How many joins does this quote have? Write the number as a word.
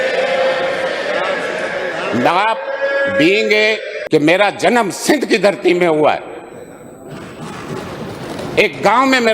one